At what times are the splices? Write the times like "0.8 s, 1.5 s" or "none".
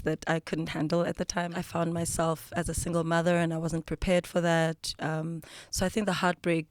1.5 s

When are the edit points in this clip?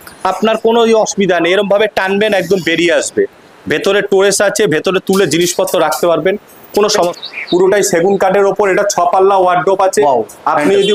7.0 s

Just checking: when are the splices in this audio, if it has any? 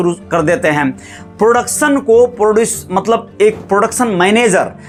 none

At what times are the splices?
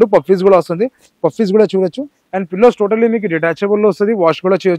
none

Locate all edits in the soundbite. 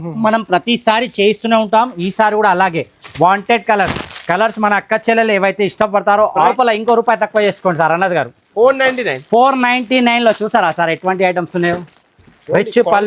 6.5 s

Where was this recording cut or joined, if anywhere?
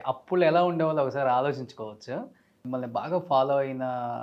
2.6 s

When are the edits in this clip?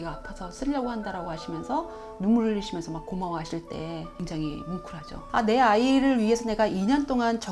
4.1 s, 5.2 s

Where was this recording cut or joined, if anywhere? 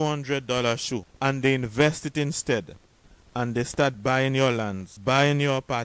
1.1 s, 4.9 s

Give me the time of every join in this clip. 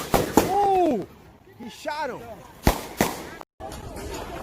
3.5 s

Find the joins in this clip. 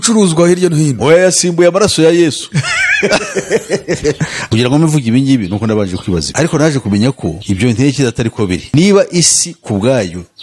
4.3 s

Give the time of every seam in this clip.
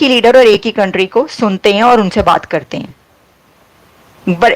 none

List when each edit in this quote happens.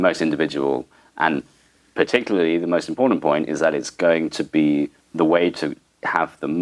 5.0 s

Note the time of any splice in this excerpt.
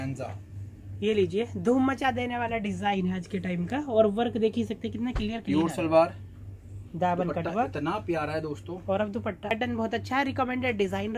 9.5 s

